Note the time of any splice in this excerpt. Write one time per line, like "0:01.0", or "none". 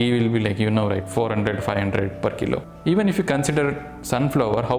0:02.7